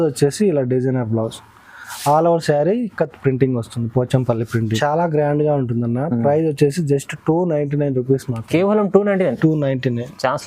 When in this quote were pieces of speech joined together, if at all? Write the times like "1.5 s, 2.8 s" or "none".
4.8 s